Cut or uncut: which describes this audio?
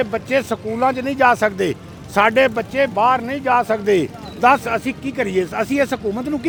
uncut